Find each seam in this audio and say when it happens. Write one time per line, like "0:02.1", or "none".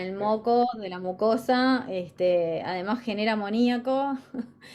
none